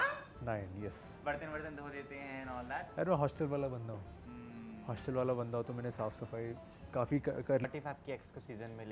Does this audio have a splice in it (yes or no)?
yes